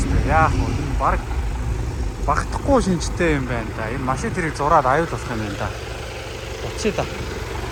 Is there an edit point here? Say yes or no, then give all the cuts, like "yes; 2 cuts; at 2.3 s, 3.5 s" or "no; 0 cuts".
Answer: no; 0 cuts